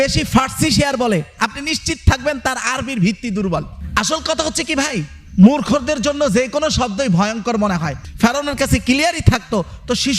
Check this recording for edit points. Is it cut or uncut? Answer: cut